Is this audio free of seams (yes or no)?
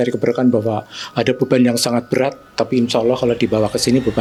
yes